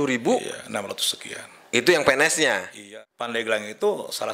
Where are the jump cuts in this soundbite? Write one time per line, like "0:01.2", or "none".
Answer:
0:02.8